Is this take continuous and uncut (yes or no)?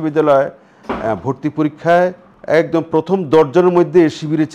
no